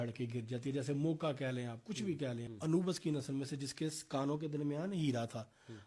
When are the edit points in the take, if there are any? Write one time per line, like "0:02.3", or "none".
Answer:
0:02.5